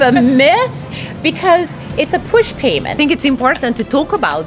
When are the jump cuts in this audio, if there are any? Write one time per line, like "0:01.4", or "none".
0:02.9